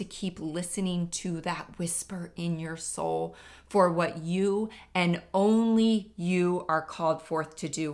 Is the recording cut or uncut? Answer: uncut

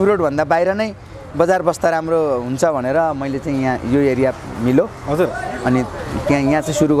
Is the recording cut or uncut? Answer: uncut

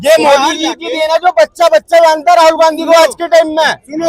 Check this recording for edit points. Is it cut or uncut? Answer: uncut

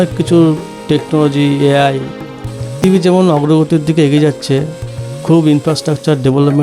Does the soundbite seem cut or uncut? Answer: cut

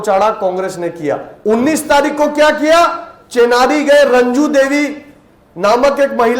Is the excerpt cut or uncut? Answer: cut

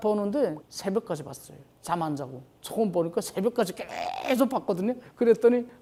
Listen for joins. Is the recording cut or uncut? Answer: uncut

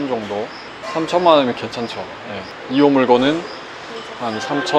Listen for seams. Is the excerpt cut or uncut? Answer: uncut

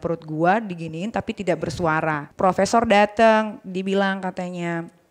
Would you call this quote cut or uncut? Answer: cut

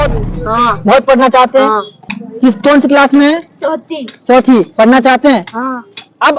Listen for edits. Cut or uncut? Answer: cut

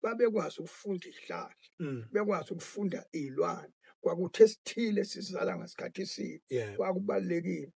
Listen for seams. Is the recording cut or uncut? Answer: uncut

